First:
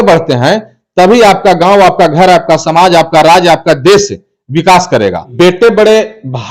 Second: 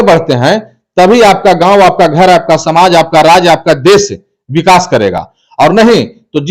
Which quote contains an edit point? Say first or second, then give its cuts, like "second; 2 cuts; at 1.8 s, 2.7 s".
first; 1 cut; at 5.3 s